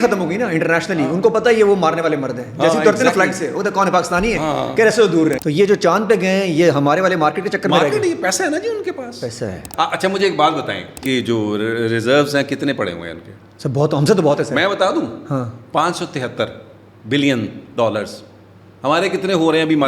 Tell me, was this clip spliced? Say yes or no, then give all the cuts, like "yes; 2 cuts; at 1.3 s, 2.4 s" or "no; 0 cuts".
yes; 3 cuts; at 5.4 s, 9.6 s, 11.0 s